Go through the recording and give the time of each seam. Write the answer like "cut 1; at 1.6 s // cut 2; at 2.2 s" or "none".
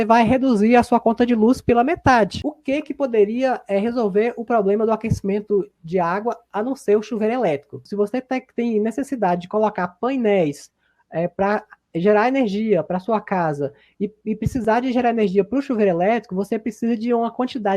cut 1; at 2.5 s // cut 2; at 7.8 s